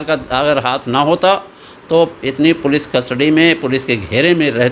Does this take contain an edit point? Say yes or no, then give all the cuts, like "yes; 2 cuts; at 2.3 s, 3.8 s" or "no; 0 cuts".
no; 0 cuts